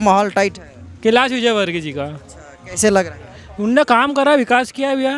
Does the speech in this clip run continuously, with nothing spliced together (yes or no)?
yes